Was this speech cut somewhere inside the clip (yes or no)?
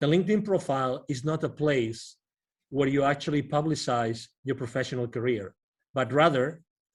no